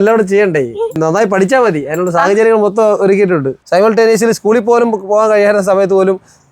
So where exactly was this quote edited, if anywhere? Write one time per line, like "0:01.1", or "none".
0:01.0
0:03.6

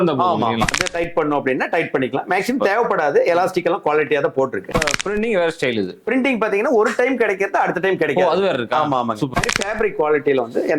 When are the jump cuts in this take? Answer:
0:00.8
0:04.8
0:09.4

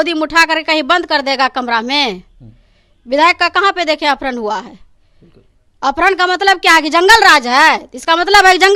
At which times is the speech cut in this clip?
none

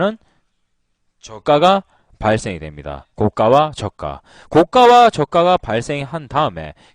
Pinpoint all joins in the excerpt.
0:02.5

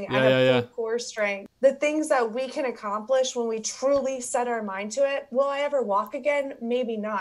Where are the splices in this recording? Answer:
0:01.4

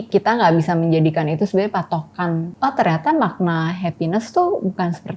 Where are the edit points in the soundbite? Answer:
0:02.5

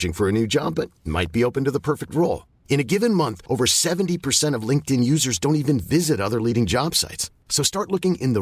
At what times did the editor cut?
none

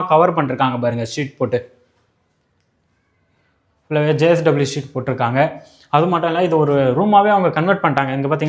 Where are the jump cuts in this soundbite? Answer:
none

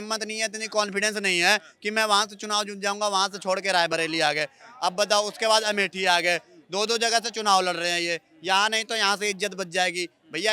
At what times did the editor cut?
none

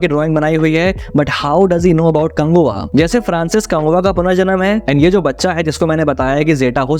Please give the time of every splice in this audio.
0:02.8

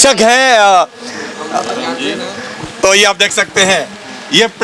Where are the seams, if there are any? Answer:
none

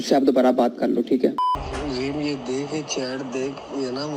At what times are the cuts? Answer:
0:01.6

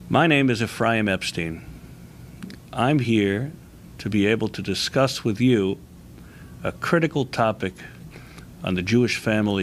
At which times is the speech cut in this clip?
none

